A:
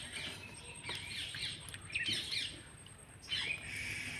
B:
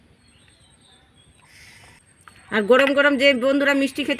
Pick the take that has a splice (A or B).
B